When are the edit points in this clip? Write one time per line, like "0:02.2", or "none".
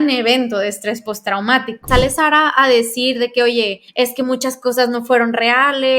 0:01.8
0:03.8